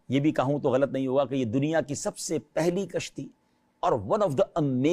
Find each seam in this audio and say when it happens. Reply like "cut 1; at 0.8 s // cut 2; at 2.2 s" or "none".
none